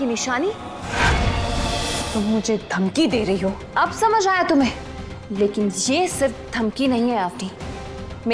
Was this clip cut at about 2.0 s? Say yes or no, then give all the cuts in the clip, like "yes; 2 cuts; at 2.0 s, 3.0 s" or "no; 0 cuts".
yes; 1 cut; at 2.0 s